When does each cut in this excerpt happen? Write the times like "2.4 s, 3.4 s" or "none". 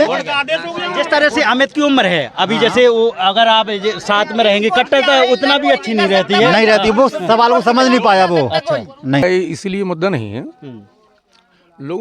9.2 s